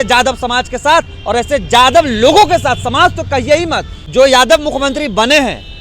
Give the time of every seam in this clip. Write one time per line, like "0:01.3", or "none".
0:03.9

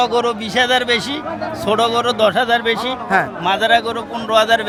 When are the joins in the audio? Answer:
none

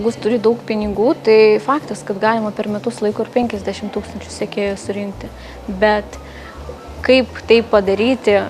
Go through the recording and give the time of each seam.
none

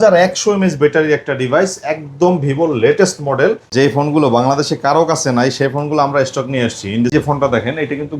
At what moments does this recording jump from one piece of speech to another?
0:03.7
0:07.1

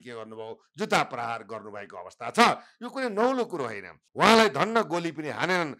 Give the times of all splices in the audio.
0:04.0

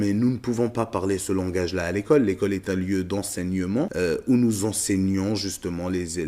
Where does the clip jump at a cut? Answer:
0:03.9

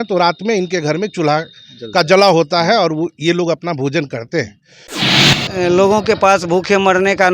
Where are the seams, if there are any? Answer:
0:05.2

